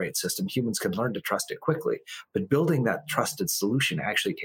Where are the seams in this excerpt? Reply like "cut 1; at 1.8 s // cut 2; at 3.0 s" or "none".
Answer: none